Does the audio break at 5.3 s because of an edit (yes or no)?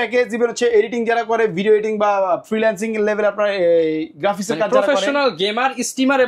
no